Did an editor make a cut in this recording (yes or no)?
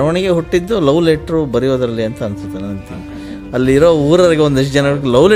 no